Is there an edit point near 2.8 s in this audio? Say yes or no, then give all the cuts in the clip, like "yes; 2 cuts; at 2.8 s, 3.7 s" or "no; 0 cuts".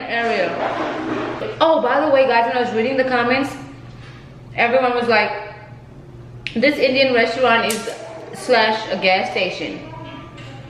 no; 1 cut; at 1.5 s